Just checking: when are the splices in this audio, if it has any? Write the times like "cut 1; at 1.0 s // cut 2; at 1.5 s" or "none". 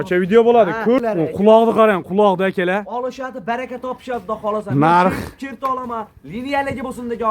cut 1; at 1.0 s